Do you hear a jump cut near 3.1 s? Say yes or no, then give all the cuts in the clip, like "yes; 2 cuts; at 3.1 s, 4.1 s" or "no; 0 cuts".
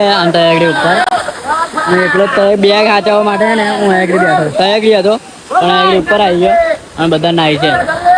no; 0 cuts